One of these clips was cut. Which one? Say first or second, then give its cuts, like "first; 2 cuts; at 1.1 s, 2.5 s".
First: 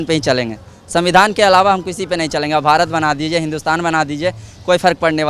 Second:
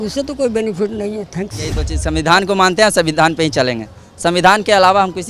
second; 1 cut; at 1.9 s